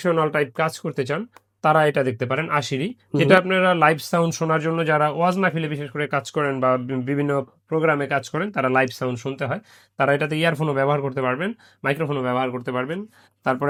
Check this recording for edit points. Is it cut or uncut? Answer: uncut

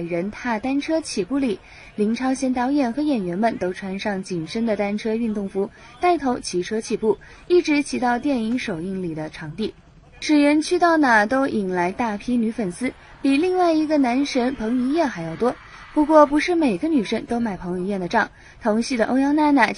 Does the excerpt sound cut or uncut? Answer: cut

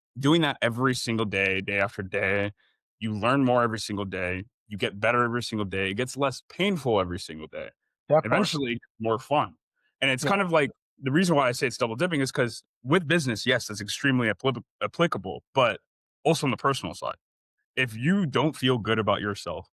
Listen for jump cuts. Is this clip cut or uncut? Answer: uncut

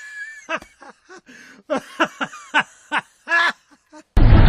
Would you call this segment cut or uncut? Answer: cut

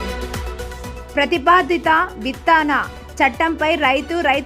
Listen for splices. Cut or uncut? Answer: cut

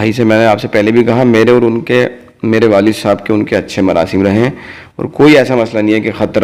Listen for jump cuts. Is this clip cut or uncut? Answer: uncut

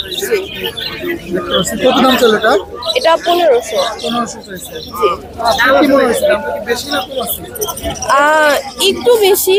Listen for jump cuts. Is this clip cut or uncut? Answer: uncut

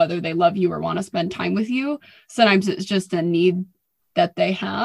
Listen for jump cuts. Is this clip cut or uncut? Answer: uncut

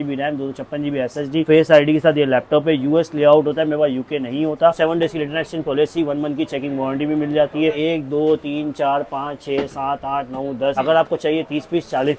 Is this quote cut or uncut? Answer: cut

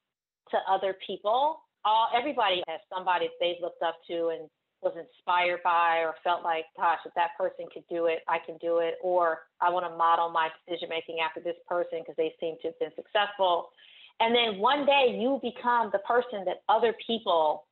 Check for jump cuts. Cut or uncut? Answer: cut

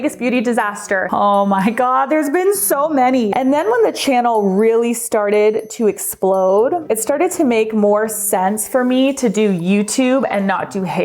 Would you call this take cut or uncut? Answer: cut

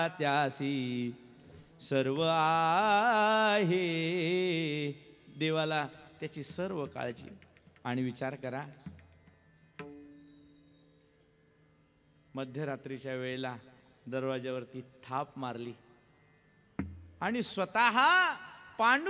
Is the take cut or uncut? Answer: uncut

